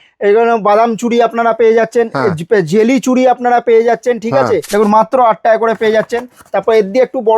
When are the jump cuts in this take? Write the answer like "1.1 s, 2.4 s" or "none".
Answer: 4.7 s